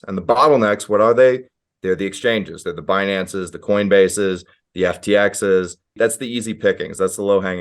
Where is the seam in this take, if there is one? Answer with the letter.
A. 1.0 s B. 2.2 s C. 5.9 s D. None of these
C